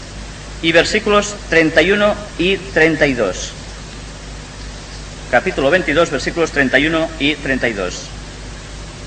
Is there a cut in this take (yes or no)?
no